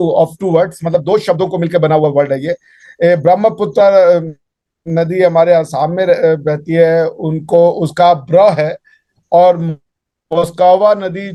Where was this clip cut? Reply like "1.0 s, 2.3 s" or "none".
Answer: none